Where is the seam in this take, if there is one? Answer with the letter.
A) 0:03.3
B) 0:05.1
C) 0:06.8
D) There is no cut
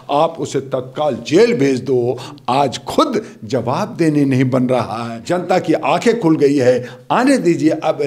B